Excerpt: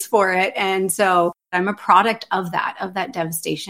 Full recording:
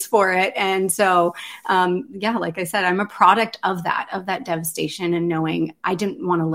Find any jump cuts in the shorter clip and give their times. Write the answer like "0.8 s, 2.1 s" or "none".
1.5 s